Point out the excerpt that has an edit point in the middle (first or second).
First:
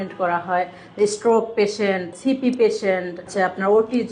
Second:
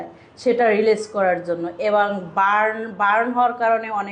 first